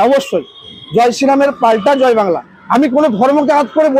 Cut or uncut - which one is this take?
uncut